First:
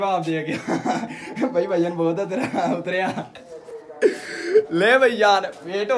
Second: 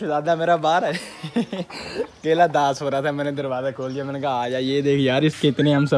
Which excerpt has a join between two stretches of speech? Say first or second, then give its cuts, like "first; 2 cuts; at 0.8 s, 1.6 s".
second; 1 cut; at 1.4 s